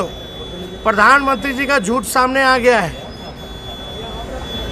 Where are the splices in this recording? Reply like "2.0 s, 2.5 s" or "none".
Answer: none

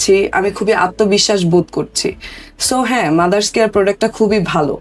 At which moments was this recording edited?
none

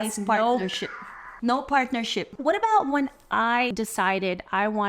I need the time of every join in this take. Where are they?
2.3 s, 3.7 s

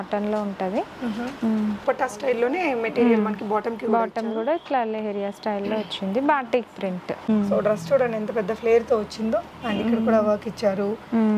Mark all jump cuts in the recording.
1.8 s, 7.3 s

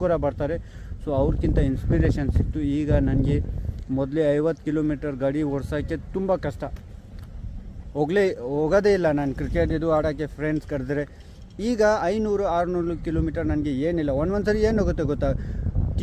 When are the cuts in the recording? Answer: none

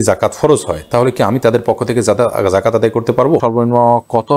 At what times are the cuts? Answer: 3.4 s

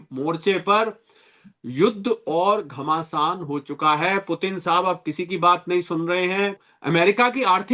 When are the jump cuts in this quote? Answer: 6.7 s

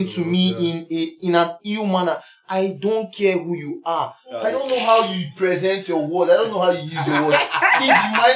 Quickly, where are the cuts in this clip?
4.4 s

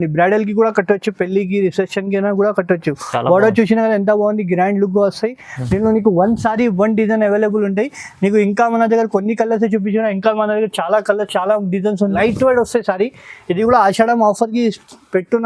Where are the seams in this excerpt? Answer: 12.1 s

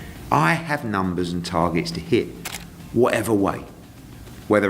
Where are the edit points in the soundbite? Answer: 2.4 s

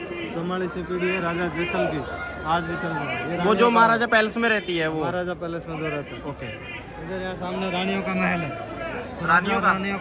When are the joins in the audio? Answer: none

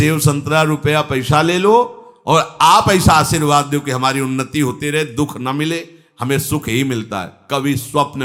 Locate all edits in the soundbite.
none

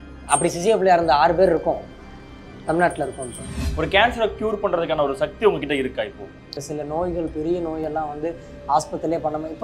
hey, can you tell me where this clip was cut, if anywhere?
3.6 s, 6.6 s

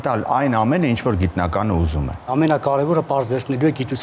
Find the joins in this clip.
2.3 s

